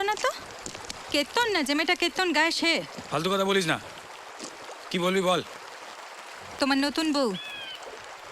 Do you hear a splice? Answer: no; 0 cuts

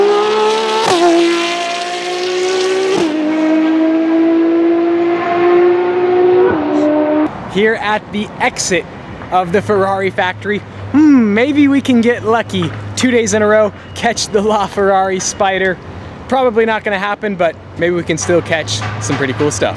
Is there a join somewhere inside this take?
yes; 1 cut; at 14.4 s

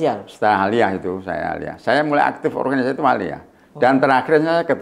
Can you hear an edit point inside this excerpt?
no; 0 cuts

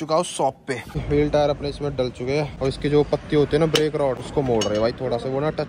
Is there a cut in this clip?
yes; 3 cuts; at 1.0 s, 2.5 s, 4.2 s

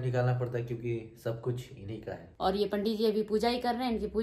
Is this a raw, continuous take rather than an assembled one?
no; 1 cut; at 2.3 s

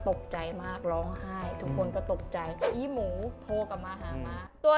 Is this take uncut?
no; 1 cut; at 2.7 s

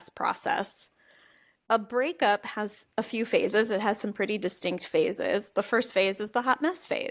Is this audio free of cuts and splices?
no; 1 cut; at 1.6 s

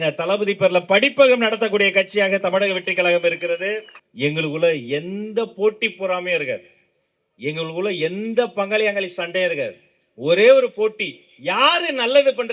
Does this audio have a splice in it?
yes; 1 cut; at 4.0 s

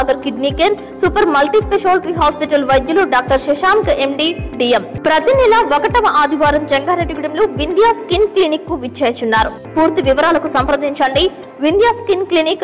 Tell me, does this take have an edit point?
yes; 2 cuts; at 4.9 s, 9.6 s

